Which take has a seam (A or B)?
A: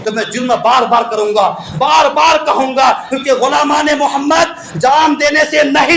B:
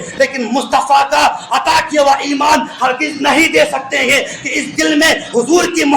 B